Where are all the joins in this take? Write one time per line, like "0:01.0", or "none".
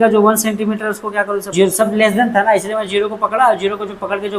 0:01.5